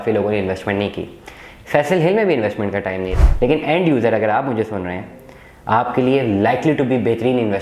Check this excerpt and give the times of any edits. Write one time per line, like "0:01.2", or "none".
0:03.0